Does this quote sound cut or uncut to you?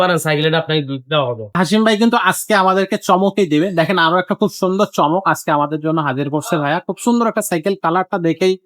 cut